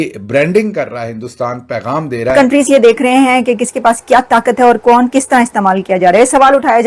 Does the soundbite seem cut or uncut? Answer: cut